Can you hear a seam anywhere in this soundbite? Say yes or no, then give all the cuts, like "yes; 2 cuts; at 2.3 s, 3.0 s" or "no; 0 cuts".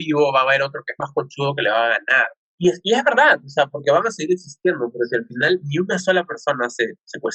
no; 0 cuts